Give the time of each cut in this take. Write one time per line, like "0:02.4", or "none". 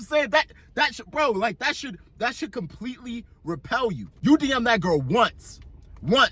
0:04.1